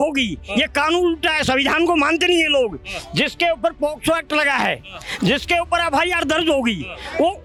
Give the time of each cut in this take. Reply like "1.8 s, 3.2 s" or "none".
none